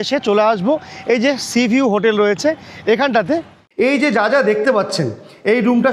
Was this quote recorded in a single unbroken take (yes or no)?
no